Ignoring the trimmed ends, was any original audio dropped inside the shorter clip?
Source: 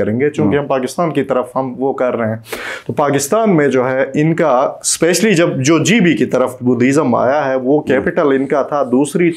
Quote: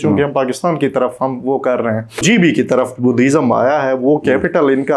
yes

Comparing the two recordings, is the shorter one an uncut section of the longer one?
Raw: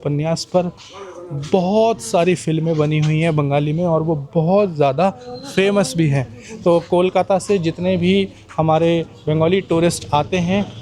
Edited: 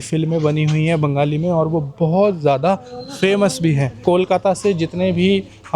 no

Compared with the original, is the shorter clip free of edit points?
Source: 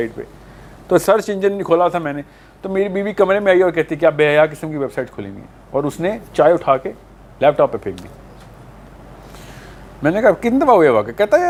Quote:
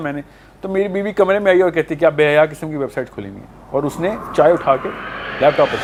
yes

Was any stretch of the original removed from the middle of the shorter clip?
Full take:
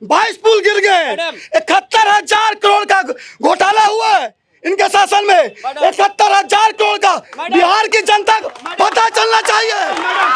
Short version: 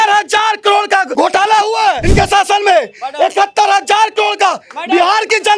yes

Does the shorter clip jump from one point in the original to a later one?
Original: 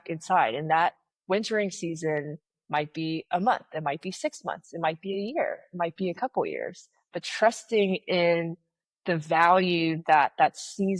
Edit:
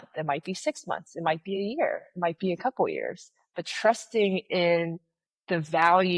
no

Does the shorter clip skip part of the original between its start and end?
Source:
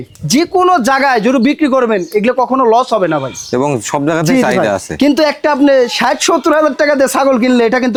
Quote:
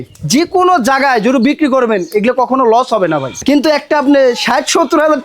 yes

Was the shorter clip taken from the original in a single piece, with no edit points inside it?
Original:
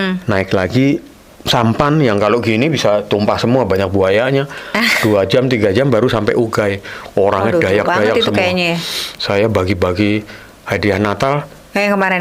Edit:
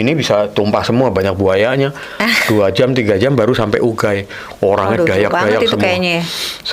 yes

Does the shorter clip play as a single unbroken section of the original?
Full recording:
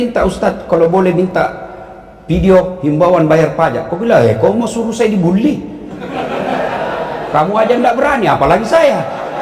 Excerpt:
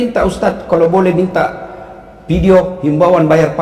yes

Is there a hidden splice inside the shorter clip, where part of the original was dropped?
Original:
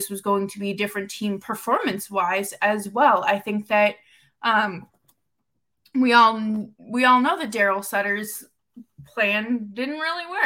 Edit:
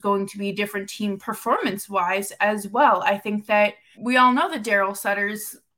yes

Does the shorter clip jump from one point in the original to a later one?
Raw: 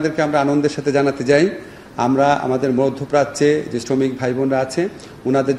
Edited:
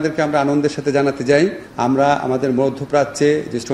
yes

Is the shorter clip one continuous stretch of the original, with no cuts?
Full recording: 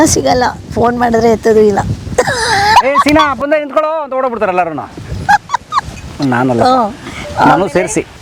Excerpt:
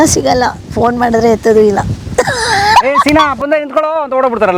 yes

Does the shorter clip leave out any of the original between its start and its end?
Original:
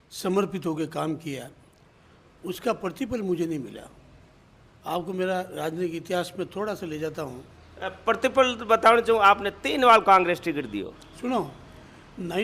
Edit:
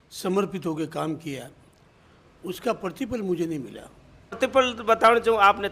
yes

